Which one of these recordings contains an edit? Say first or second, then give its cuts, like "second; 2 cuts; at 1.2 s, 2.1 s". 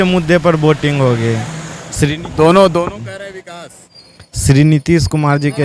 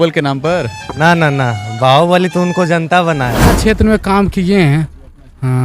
second; 1 cut; at 3.6 s